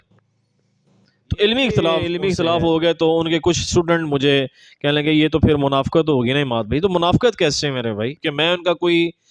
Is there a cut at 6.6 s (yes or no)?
no